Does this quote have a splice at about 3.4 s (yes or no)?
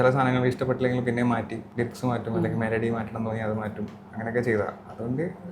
no